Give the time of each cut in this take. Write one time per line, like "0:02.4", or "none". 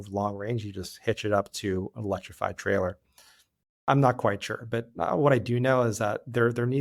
none